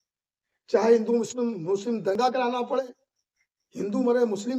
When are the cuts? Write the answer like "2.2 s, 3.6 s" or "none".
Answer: 2.1 s

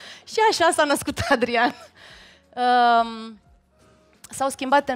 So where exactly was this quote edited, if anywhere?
none

